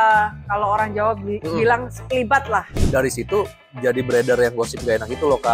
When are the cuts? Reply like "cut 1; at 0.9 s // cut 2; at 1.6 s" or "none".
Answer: cut 1; at 2.9 s